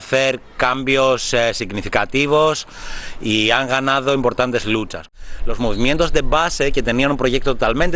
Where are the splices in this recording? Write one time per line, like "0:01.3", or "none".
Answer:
0:05.0